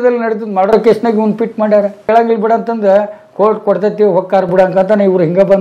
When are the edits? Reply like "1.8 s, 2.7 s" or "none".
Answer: 2.0 s